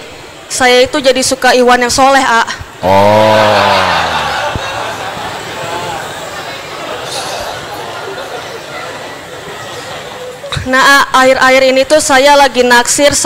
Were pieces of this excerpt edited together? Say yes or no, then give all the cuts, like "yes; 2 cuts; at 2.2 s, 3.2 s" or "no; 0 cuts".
no; 0 cuts